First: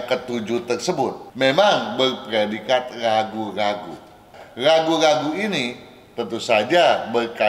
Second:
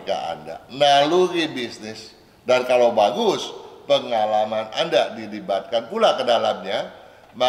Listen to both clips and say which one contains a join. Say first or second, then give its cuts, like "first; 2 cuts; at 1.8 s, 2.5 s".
first; 2 cuts; at 1.2 s, 4.4 s